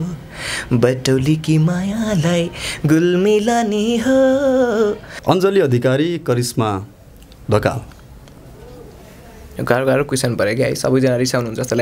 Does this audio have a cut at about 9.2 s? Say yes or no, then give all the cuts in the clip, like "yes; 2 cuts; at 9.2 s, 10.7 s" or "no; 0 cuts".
no; 1 cut; at 5.1 s